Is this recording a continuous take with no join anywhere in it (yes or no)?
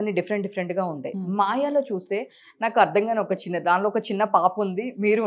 yes